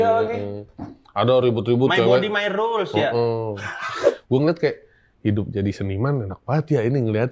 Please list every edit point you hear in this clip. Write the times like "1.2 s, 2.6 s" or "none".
4.0 s